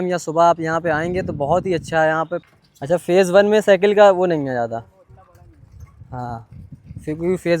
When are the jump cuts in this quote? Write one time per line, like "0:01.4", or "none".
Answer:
0:02.4